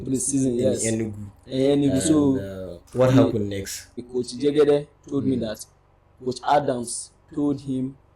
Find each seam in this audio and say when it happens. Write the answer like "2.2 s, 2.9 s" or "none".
4.0 s